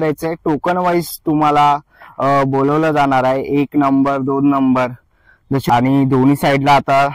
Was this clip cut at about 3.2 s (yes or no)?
no